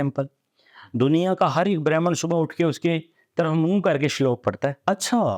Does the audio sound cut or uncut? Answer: uncut